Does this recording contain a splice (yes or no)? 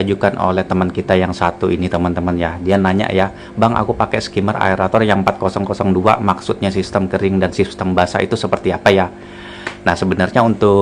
no